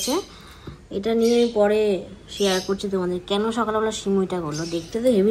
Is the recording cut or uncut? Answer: uncut